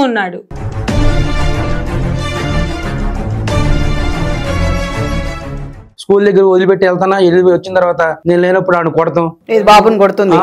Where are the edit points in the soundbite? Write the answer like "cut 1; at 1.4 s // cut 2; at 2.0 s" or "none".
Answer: cut 1; at 5.9 s